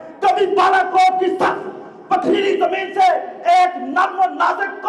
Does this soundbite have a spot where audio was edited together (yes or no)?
no